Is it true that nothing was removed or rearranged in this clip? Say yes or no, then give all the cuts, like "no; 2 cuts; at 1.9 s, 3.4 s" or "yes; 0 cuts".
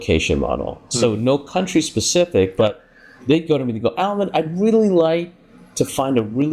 yes; 0 cuts